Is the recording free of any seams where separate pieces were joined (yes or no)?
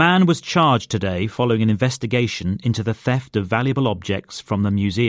yes